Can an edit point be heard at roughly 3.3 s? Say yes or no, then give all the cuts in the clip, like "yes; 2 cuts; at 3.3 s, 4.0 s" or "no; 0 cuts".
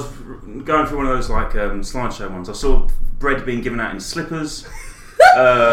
no; 0 cuts